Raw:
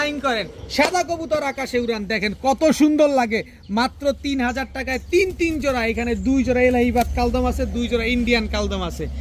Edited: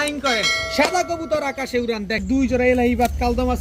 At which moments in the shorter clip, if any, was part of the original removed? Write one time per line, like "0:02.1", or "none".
0:02.2